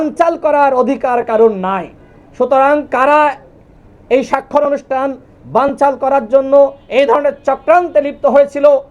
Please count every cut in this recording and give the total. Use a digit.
0